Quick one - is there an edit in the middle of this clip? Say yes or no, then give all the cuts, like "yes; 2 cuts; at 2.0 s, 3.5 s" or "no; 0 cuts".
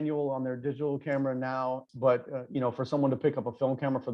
yes; 1 cut; at 1.9 s